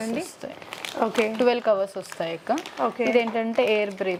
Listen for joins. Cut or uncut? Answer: uncut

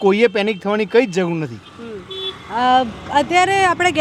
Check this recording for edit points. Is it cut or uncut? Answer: uncut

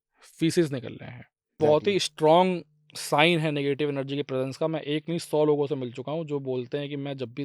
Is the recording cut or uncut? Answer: cut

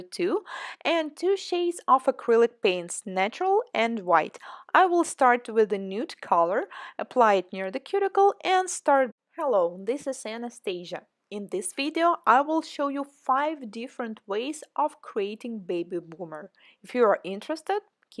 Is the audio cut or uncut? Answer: uncut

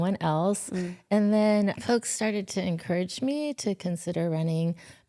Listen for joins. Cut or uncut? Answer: cut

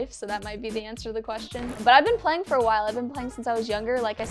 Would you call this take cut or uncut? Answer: cut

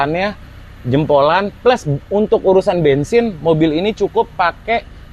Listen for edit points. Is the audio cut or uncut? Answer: uncut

